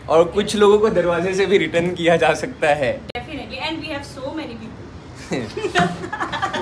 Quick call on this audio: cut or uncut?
uncut